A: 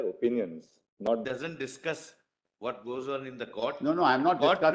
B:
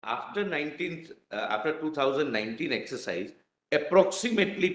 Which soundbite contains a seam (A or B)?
A